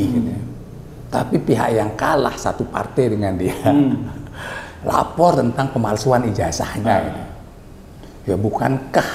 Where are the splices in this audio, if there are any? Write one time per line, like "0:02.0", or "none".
none